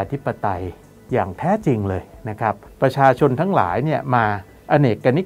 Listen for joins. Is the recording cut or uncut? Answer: cut